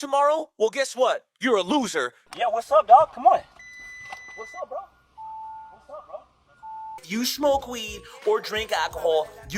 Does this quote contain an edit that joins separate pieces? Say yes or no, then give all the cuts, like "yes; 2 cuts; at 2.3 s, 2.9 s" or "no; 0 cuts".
yes; 2 cuts; at 2.2 s, 7.0 s